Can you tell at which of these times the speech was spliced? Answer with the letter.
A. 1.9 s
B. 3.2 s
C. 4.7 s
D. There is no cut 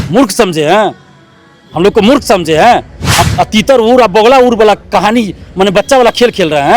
B